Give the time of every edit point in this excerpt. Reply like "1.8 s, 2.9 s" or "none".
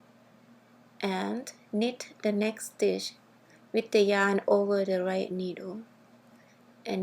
1.0 s

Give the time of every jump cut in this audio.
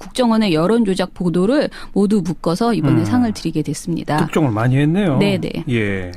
2.3 s

